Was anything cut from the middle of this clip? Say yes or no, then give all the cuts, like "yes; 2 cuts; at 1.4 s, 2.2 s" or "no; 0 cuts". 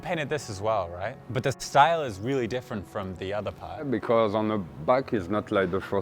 yes; 2 cuts; at 1.2 s, 3.9 s